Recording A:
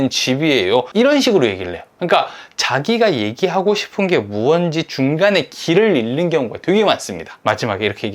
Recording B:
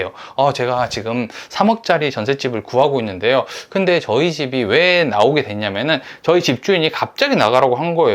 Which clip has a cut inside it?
A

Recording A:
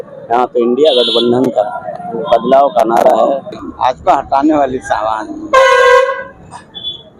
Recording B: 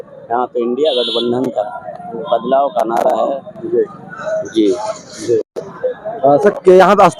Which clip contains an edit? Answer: A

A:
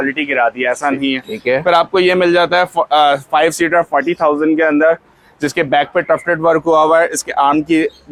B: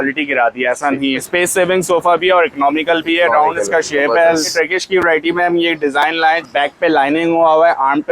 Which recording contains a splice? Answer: B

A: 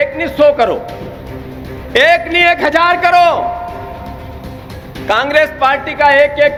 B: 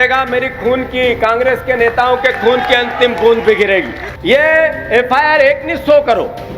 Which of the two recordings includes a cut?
B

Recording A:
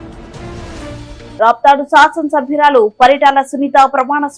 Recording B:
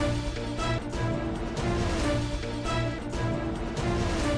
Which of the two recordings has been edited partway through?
A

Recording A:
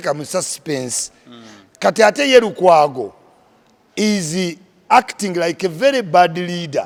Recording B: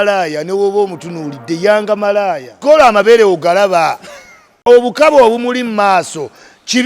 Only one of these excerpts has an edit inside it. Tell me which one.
B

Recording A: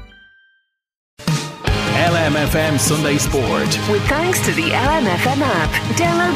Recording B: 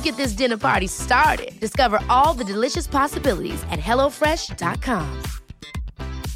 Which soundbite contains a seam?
A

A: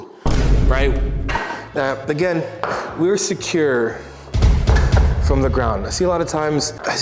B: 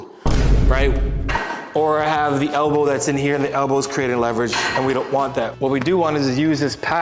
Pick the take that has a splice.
A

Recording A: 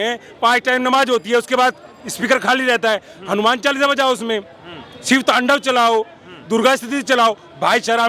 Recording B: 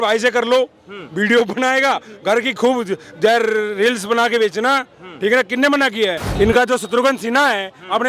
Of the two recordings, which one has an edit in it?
B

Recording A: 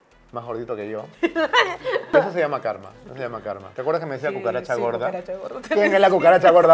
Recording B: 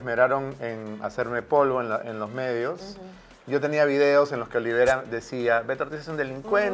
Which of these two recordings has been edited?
A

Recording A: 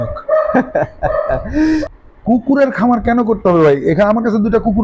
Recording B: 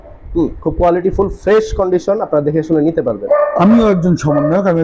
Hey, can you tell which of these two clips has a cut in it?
A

